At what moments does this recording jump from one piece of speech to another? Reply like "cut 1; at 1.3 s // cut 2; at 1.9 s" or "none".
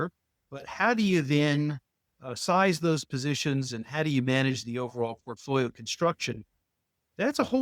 none